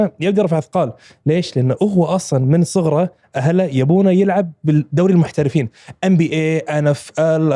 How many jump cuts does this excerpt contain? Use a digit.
0